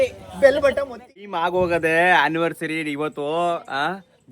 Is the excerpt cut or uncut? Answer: cut